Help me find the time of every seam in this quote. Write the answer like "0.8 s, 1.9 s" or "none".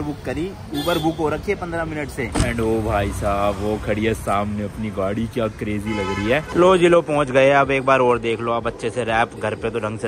2.3 s, 6.5 s